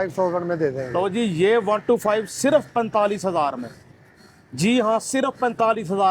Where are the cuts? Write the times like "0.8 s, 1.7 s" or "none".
none